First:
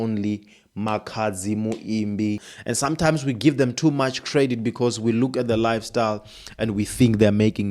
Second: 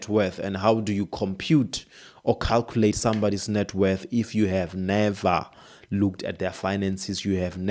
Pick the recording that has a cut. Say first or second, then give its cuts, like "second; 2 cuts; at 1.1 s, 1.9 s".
first; 1 cut; at 2.5 s